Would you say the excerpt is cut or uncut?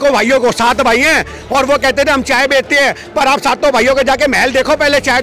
uncut